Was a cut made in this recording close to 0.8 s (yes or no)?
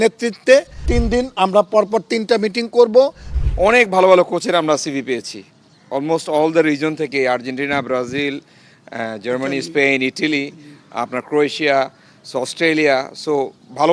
yes